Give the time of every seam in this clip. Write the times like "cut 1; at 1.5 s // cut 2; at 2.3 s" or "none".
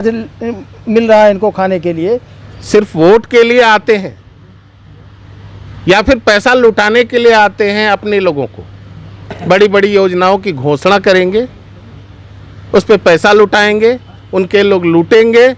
cut 1; at 2.4 s